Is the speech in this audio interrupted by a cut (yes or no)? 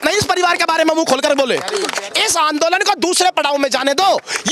yes